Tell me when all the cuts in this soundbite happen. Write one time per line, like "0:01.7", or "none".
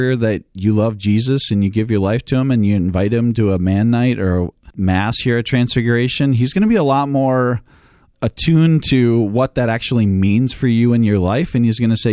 0:04.6

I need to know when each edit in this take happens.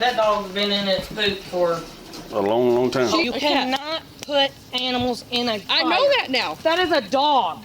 0:03.2
0:06.5

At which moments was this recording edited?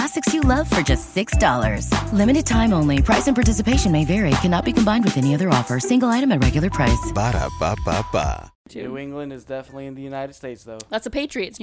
0:08.6

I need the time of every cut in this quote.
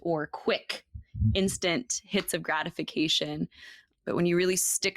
0:03.9

